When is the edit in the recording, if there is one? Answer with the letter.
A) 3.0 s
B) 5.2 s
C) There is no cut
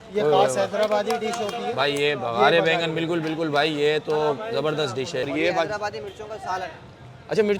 B